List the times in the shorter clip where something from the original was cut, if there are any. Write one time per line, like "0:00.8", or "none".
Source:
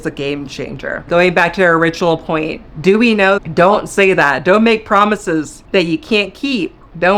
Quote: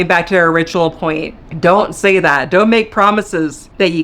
0:01.5